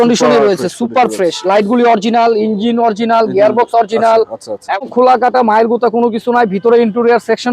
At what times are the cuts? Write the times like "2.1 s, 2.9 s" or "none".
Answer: 4.8 s